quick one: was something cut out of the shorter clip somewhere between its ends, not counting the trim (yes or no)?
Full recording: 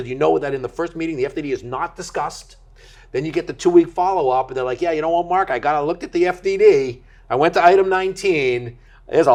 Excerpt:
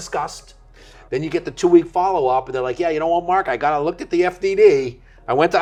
no